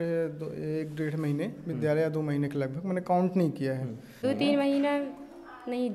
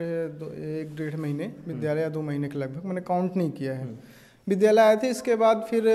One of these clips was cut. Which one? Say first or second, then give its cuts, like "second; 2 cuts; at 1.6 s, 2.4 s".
first; 1 cut; at 4.1 s